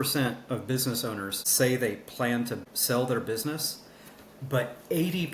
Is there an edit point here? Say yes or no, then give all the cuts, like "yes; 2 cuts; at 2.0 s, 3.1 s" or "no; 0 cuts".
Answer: yes; 2 cuts; at 1.4 s, 2.6 s